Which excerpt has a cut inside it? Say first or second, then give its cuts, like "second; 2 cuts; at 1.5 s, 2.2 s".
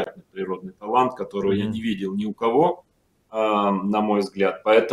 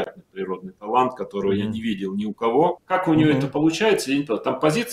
second; 1 cut; at 2.8 s